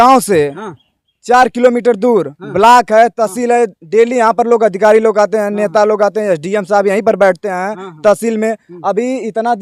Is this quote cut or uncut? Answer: uncut